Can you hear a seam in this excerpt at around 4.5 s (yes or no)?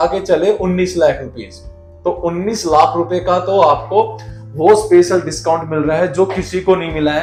no